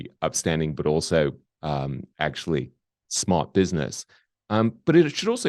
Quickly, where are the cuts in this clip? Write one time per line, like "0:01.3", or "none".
none